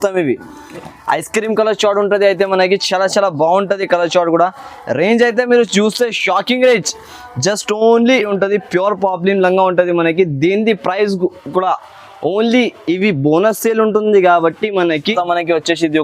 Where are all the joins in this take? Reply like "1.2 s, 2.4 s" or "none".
8.3 s, 15.1 s